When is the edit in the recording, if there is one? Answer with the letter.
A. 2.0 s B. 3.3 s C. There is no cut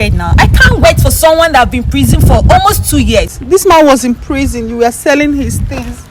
B